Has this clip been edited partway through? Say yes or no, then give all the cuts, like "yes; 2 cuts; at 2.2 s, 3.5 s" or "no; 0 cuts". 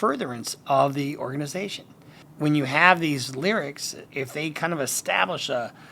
yes; 1 cut; at 4.0 s